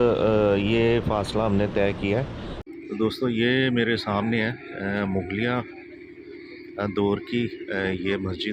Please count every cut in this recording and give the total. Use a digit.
1